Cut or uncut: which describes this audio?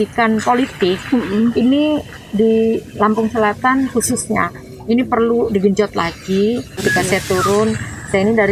cut